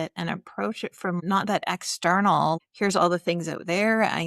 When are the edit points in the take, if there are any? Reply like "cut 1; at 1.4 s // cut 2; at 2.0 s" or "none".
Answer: cut 1; at 1.2 s // cut 2; at 2.6 s